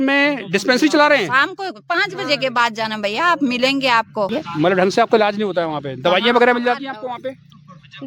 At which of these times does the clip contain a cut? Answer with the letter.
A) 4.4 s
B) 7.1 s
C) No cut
A